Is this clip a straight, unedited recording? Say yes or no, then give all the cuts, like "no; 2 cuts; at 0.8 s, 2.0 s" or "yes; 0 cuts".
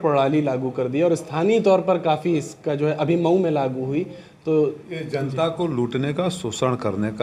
yes; 0 cuts